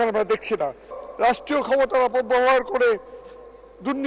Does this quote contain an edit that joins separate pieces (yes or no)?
yes